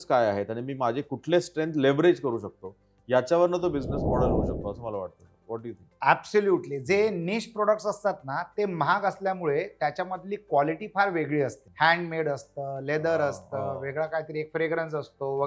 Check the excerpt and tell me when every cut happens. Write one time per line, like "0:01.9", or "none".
0:05.9
0:11.6